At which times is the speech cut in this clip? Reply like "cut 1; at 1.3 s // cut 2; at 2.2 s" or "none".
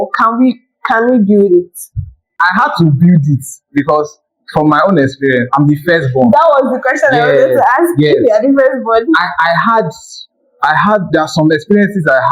cut 1; at 2.3 s